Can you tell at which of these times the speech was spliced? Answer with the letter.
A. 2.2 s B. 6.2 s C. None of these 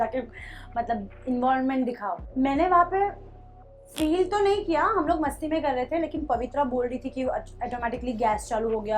A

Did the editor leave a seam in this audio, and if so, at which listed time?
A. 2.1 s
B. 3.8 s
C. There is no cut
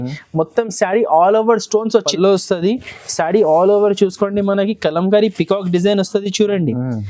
A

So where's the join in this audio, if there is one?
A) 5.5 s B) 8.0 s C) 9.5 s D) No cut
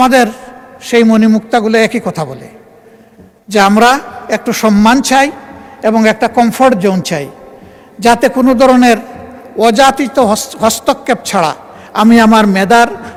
D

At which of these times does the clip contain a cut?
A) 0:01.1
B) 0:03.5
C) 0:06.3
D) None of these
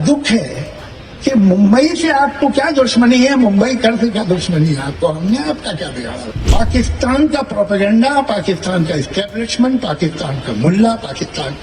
C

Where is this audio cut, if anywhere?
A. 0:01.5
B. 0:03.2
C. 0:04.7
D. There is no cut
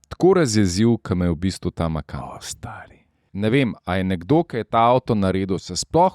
B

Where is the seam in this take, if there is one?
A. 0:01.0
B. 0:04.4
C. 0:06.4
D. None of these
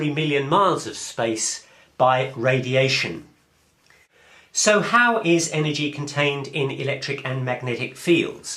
A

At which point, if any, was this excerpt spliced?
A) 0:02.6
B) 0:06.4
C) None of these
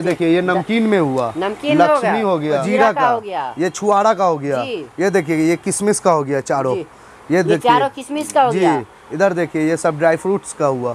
A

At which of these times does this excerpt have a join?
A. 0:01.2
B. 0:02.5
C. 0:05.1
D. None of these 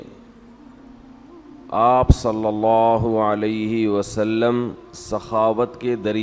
D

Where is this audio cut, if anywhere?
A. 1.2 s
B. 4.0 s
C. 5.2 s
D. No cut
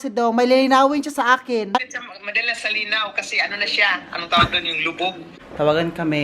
C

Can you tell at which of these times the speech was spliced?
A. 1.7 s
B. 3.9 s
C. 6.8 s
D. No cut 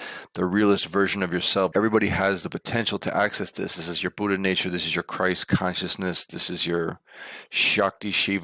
A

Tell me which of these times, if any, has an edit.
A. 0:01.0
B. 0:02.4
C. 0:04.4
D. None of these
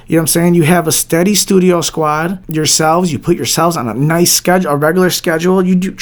B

